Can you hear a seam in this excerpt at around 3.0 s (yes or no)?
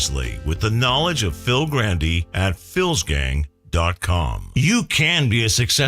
no